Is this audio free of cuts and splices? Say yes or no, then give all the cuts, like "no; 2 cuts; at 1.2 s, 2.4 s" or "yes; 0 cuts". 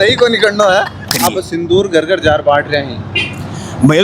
no; 1 cut; at 1.1 s